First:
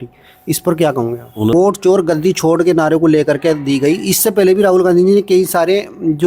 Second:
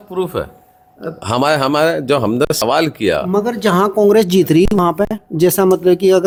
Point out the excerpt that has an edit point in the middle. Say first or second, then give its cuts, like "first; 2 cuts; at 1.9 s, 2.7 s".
first; 1 cut; at 1.5 s